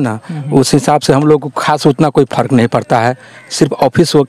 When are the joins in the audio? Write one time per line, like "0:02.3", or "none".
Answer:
none